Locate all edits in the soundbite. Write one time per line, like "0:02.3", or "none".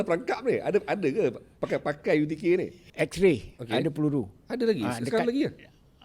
0:02.8